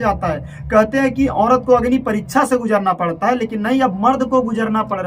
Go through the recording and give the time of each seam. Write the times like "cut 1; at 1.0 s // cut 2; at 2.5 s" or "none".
none

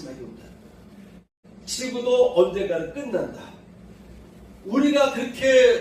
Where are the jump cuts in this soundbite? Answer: cut 1; at 1.3 s

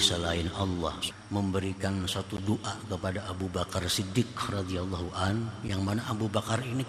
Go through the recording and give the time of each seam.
cut 1; at 1.1 s

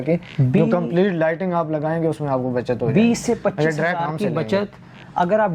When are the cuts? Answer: none

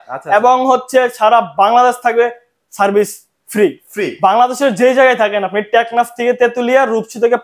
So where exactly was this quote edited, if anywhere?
none

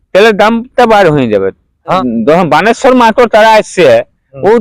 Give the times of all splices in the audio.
cut 1; at 1.9 s

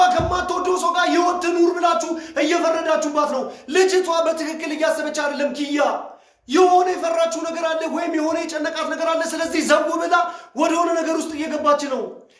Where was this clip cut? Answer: none

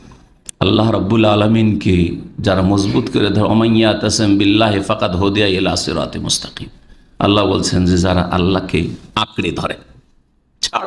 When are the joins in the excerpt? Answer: none

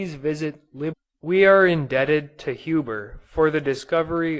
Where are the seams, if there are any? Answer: none

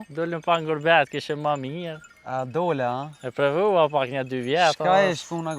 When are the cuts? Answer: none

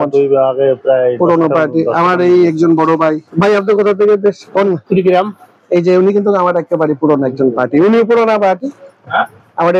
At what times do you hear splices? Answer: none

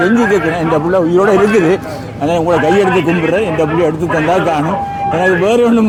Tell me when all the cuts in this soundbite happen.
none

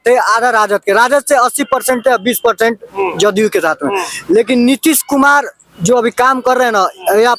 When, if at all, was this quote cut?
none

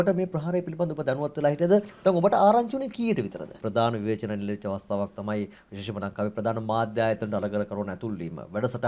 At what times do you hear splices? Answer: cut 1; at 3.6 s

